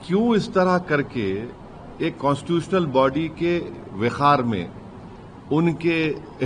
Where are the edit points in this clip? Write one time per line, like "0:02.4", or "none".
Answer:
none